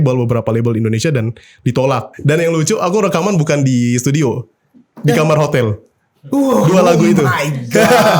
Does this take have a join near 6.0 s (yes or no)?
no